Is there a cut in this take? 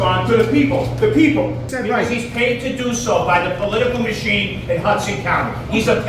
yes; 1 cut; at 1.7 s

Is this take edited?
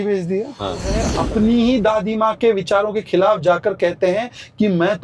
yes; 1 cut; at 1.1 s

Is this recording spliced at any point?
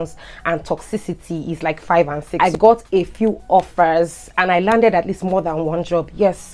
yes; 1 cut; at 2.2 s

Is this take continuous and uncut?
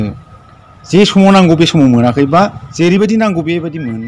yes; 0 cuts

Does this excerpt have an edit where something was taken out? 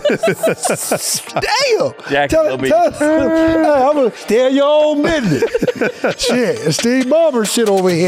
yes; 2 cuts; at 2.0 s, 4.2 s

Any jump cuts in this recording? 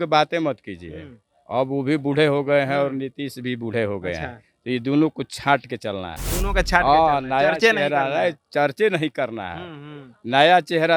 no; 0 cuts

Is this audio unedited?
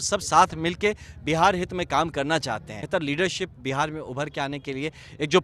no; 1 cut; at 2.8 s

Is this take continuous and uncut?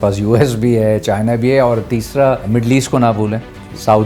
no; 1 cut; at 2.4 s

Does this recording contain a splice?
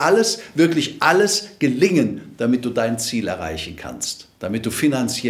no; 0 cuts

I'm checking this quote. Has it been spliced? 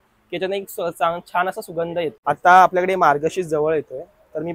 no; 0 cuts

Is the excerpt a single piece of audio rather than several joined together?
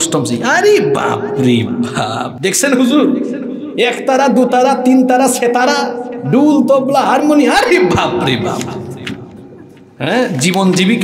yes; 0 cuts

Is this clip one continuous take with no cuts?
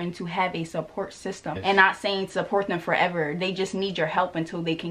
no; 1 cut; at 1.6 s

